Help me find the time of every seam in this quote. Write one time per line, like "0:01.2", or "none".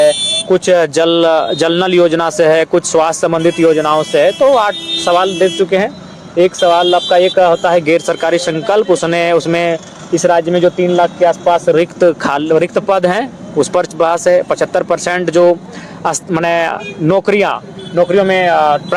none

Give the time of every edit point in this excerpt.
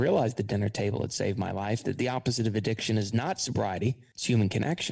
none

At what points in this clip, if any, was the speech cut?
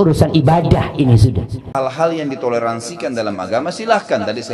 0:01.7

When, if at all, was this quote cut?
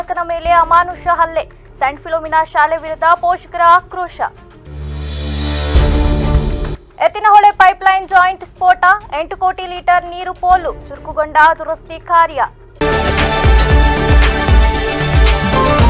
0:12.6

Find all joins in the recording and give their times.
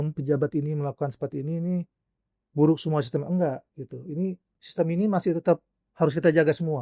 none

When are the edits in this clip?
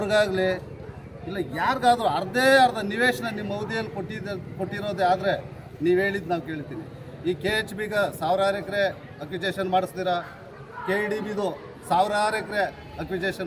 none

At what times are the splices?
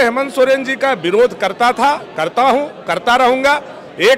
none

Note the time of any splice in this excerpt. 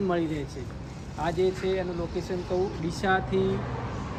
none

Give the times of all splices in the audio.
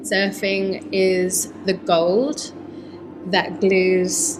none

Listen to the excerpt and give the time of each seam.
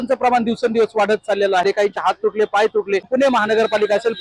0:02.0
0:03.1

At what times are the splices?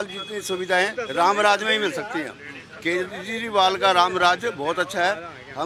none

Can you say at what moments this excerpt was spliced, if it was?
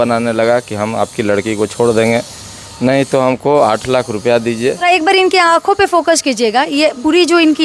0:04.8

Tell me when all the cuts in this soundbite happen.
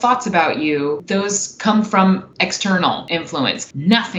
0:01.0
0:02.3
0:03.4

